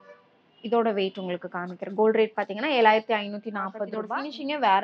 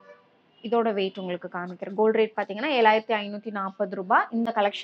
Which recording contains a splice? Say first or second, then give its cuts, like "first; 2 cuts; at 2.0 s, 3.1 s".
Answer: first; 1 cut; at 3.9 s